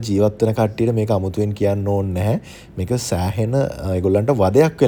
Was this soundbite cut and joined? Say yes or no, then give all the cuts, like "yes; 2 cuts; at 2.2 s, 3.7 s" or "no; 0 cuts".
no; 0 cuts